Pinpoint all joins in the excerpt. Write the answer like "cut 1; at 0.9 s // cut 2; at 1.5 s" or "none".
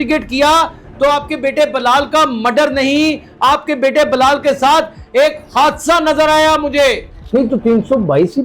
cut 1; at 7.1 s

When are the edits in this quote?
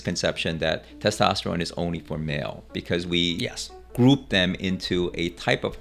none

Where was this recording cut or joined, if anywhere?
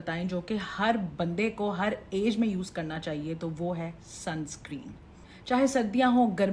none

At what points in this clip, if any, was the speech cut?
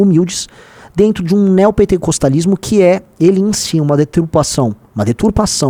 none

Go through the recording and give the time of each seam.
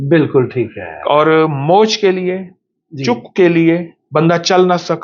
cut 1; at 4.0 s

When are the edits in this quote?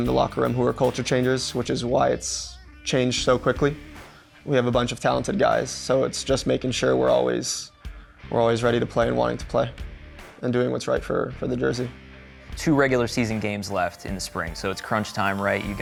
none

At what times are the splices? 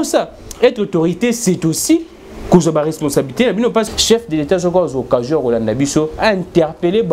cut 1; at 3.8 s

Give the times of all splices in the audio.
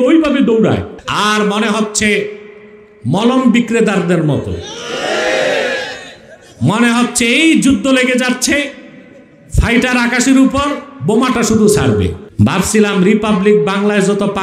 cut 1; at 1.0 s // cut 2; at 12.2 s

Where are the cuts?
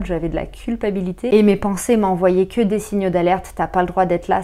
cut 1; at 1.3 s

